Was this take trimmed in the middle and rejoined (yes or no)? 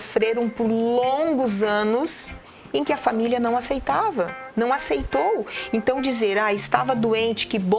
no